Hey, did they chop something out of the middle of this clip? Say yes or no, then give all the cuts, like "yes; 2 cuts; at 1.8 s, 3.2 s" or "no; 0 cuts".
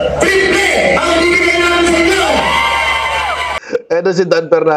yes; 1 cut; at 3.5 s